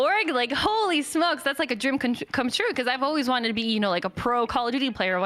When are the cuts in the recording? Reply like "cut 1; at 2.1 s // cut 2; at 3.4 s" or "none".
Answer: none

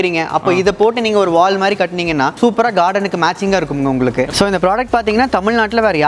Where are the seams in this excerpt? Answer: cut 1; at 2.3 s // cut 2; at 4.3 s

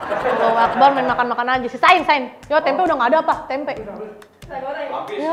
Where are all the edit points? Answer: none

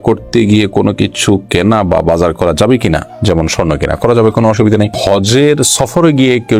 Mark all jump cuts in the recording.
none

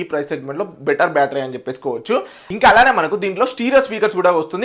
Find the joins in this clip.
cut 1; at 2.4 s

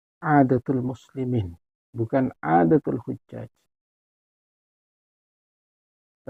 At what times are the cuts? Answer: none

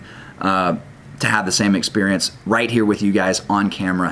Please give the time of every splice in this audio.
none

